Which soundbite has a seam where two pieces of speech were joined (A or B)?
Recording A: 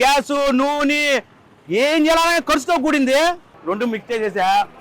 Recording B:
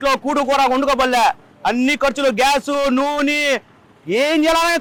A